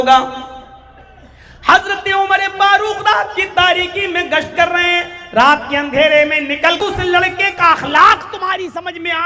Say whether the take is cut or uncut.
cut